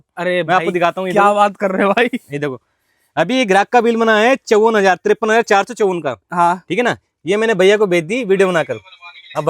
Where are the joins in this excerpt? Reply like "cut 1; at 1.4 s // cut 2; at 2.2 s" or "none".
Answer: none